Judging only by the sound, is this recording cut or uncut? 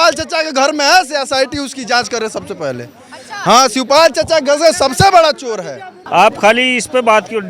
cut